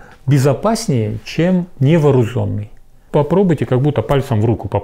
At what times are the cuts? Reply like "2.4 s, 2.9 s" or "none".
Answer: 3.0 s